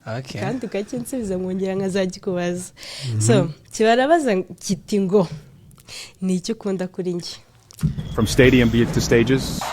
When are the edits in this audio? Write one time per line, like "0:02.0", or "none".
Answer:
0:08.0